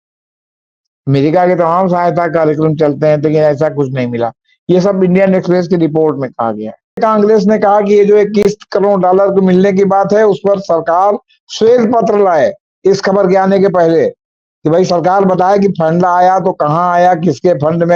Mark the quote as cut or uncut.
cut